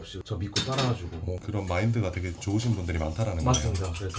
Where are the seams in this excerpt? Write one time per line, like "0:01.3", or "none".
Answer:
none